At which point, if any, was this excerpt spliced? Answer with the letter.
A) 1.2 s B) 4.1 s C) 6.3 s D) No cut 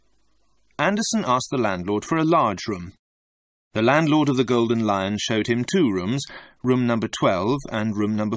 A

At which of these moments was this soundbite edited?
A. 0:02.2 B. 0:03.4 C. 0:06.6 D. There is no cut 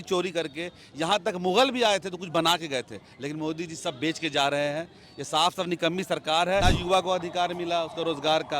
C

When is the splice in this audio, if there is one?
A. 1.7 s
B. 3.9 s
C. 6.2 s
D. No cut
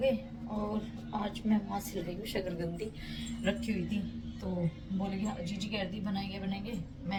D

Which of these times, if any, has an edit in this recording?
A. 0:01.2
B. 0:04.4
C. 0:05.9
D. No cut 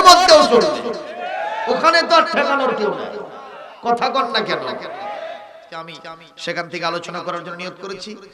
C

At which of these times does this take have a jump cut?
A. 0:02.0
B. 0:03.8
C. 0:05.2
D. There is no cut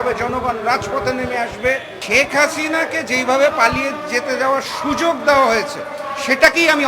A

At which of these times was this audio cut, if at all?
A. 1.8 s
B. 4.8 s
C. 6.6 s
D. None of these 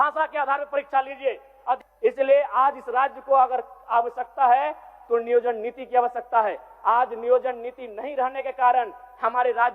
A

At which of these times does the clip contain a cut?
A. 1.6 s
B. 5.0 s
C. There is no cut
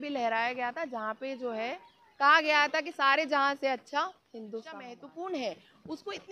B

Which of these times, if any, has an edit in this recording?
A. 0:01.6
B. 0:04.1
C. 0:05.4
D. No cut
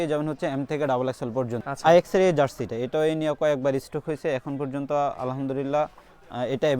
A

